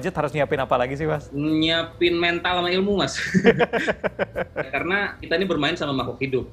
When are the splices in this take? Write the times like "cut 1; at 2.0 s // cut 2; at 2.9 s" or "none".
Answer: cut 1; at 1.3 s // cut 2; at 4.7 s